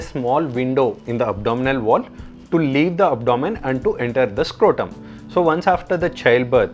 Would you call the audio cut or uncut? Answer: uncut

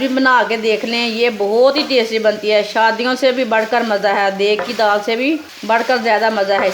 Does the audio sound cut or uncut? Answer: cut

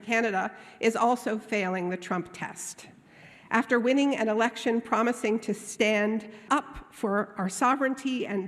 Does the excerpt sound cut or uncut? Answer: cut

